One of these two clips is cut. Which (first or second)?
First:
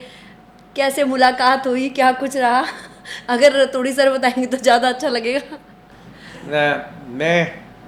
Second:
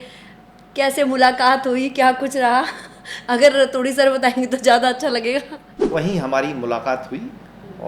second